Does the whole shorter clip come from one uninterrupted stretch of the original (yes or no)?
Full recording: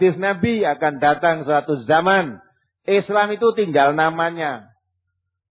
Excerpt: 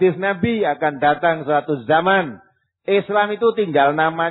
yes